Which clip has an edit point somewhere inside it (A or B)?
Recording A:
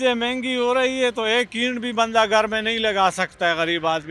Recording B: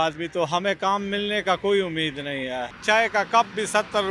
B